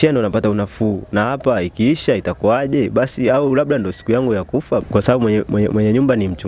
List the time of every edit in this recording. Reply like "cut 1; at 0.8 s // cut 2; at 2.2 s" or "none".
cut 1; at 4.8 s